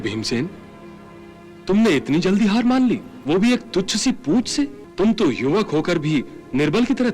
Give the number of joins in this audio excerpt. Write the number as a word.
two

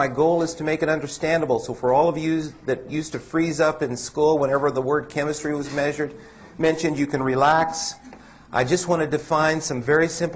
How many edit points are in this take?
zero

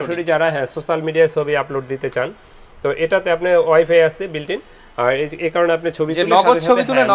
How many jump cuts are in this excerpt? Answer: zero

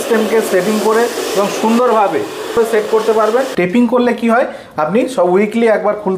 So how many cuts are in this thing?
two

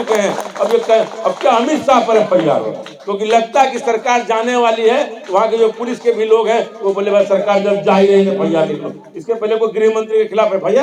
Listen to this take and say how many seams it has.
zero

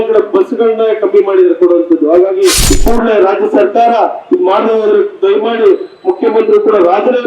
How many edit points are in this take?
one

